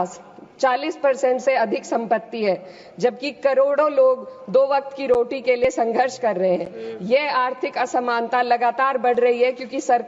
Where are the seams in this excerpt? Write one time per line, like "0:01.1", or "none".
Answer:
none